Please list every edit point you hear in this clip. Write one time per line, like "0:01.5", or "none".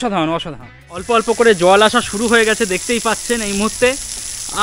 0:01.1